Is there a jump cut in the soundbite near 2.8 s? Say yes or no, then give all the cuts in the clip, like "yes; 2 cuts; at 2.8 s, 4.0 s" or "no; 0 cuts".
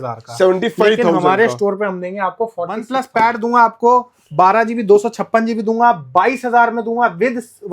yes; 1 cut; at 2.8 s